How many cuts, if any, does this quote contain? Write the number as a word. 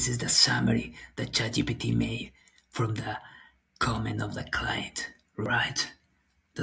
one